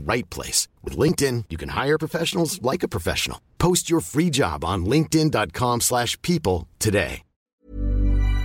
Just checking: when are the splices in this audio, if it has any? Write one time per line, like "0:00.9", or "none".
0:07.4